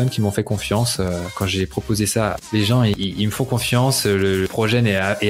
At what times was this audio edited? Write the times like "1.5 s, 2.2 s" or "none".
2.4 s